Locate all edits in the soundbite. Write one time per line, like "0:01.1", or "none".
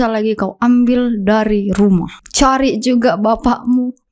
0:02.2